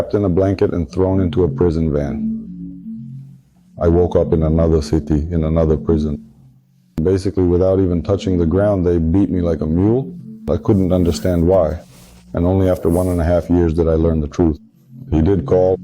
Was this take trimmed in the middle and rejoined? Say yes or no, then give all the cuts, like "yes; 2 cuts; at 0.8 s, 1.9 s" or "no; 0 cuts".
no; 0 cuts